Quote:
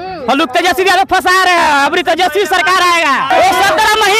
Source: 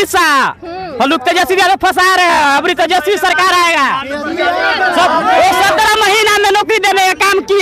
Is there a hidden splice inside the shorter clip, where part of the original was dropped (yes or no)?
yes